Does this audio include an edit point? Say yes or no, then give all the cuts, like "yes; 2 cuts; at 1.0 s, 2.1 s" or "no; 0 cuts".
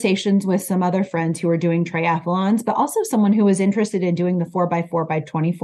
no; 0 cuts